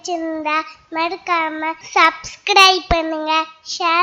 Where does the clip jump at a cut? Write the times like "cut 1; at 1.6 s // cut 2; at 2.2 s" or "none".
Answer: cut 1; at 1.8 s